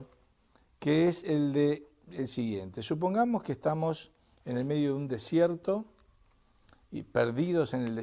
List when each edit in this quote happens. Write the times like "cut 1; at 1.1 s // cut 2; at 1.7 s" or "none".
cut 1; at 6.8 s